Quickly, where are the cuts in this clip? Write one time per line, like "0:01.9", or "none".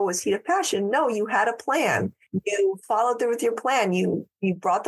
0:02.2